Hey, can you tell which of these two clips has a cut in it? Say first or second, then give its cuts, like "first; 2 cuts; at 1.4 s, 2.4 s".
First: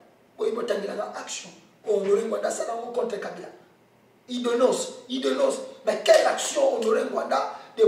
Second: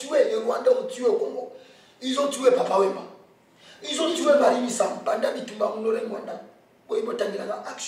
second; 1 cut; at 5.0 s